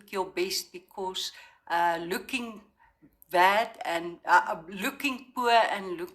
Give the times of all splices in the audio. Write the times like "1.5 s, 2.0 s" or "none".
none

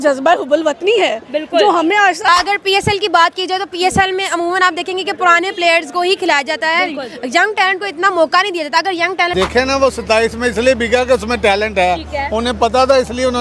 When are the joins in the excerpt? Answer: 2.3 s, 9.3 s

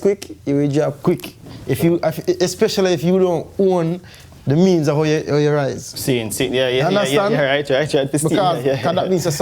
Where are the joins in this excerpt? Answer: none

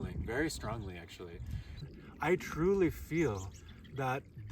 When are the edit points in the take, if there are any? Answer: 1.9 s

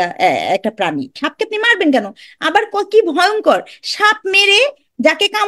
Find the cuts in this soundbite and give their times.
1.2 s

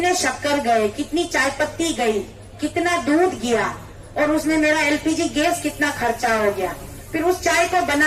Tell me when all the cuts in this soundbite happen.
none

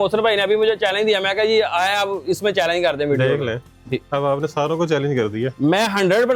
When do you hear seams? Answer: none

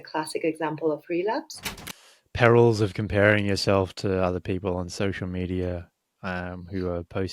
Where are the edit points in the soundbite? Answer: 2.1 s

